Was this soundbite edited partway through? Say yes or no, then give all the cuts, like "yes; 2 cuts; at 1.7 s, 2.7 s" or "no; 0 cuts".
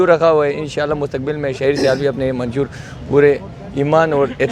no; 0 cuts